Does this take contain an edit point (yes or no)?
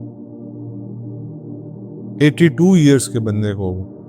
yes